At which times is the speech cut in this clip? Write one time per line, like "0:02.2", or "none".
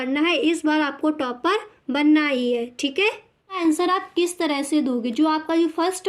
0:03.6